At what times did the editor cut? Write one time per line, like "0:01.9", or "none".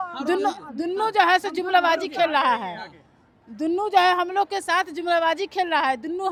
none